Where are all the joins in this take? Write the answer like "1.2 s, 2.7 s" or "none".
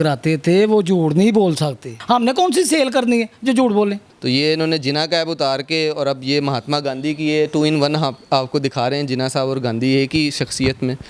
1.9 s, 4.1 s